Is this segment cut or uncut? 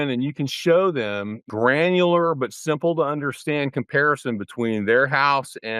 cut